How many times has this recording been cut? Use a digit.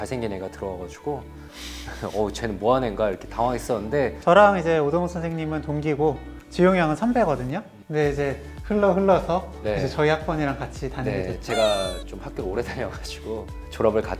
1